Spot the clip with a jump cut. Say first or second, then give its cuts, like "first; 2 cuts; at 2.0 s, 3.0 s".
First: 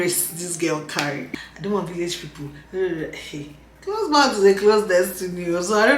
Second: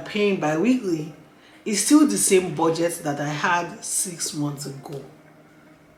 first; 1 cut; at 1.3 s